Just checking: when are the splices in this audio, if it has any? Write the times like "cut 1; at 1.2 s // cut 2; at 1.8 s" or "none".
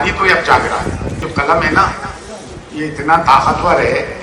cut 1; at 1.2 s